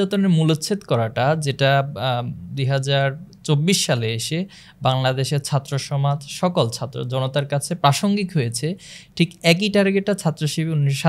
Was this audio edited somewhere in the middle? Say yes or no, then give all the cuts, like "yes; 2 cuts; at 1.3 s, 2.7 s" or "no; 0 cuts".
no; 0 cuts